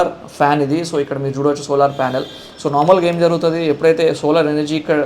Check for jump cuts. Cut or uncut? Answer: uncut